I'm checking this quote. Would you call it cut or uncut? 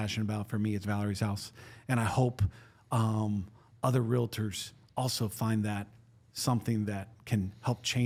uncut